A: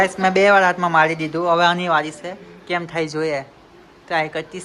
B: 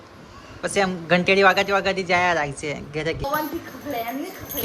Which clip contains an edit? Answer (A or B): B